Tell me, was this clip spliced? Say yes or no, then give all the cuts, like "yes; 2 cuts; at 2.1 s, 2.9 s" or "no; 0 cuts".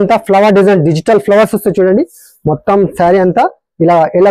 no; 0 cuts